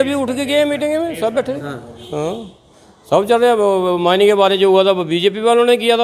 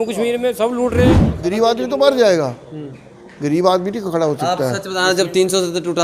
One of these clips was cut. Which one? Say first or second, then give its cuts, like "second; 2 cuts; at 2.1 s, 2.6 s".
second; 1 cut; at 1.3 s